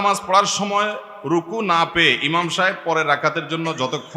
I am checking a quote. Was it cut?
no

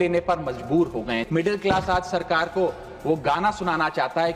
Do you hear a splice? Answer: yes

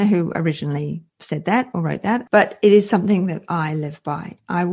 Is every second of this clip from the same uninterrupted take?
no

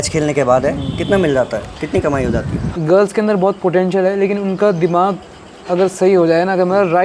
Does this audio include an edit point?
yes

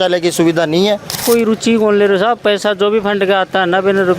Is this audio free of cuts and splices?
no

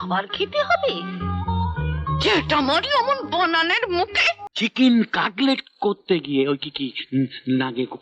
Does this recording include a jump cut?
yes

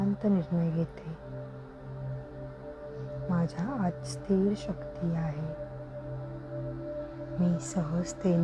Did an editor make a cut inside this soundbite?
yes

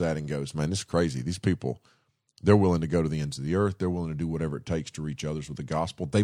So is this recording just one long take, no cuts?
yes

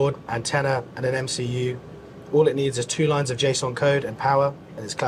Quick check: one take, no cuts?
yes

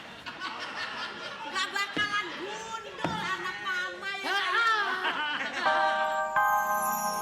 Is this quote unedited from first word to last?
no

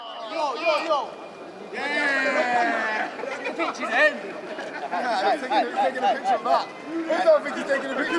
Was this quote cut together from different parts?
no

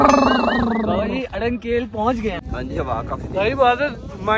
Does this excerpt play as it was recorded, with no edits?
no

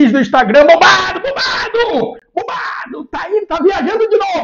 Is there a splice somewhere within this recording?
no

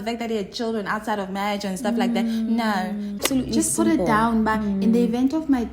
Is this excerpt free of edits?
no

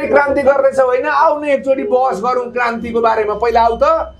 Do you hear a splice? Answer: no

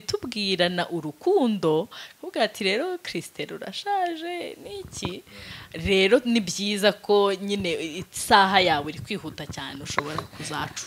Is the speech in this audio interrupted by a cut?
no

